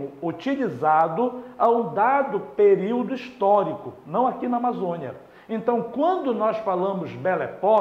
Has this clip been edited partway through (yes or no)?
no